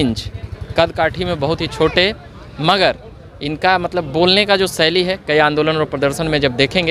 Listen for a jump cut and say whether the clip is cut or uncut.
uncut